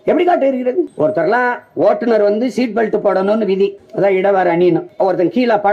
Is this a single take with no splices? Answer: no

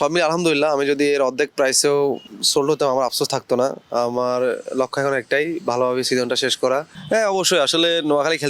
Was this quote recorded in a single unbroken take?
no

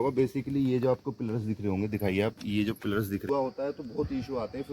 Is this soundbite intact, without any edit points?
no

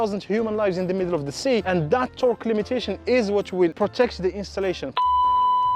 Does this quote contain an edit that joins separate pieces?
yes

